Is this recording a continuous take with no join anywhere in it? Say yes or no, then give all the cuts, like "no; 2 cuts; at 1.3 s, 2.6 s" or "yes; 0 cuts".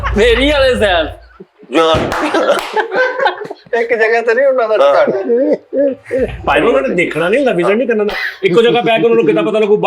yes; 0 cuts